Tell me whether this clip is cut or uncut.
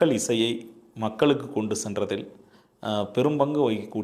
uncut